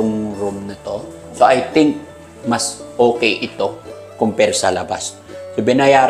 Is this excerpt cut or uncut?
uncut